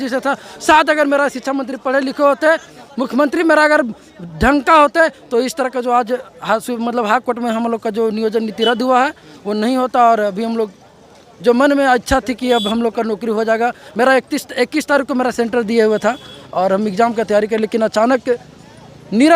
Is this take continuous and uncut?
yes; 0 cuts

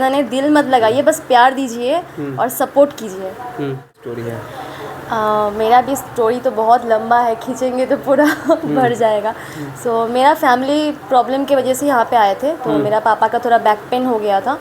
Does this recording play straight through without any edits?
no; 1 cut; at 4.1 s

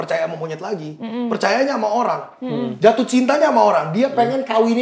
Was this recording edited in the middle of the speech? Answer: no; 0 cuts

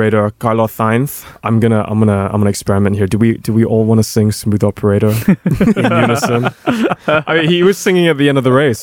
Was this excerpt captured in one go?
no; 1 cut; at 1.3 s

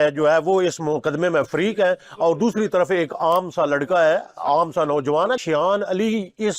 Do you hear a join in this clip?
yes; 1 cut; at 5.4 s

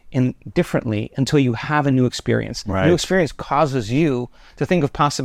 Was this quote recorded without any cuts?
yes; 0 cuts

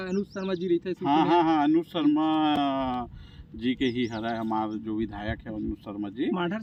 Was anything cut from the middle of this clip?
no; 0 cuts

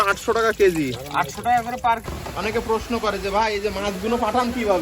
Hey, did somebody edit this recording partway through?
yes; 1 cut; at 2.2 s

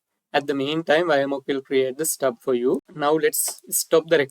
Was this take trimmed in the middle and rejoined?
yes; 1 cut; at 2.9 s

